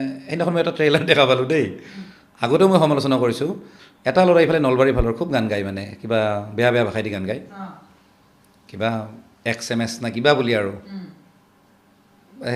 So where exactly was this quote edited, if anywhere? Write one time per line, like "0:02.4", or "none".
none